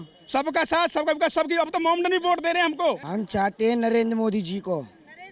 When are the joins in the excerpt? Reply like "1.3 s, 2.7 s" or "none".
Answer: 3.0 s